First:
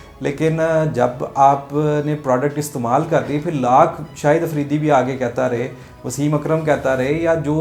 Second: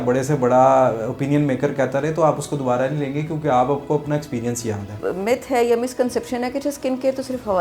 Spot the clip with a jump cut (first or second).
second